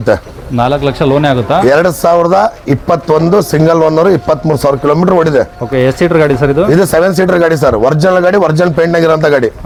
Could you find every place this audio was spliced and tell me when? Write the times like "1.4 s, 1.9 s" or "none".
none